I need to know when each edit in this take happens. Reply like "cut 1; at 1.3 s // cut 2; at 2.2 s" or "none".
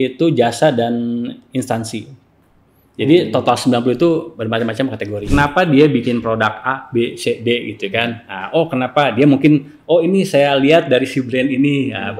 cut 1; at 5.2 s